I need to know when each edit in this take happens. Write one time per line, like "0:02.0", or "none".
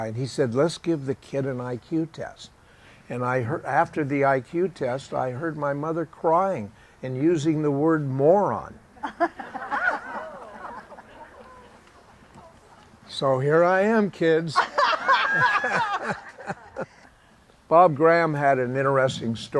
0:03.6